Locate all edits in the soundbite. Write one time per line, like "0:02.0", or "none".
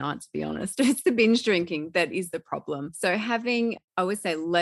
0:02.9